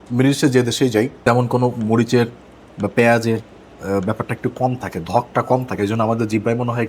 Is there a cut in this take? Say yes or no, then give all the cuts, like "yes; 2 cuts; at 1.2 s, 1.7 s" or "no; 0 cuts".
yes; 1 cut; at 1.1 s